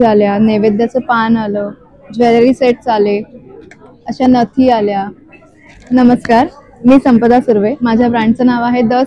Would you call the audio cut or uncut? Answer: uncut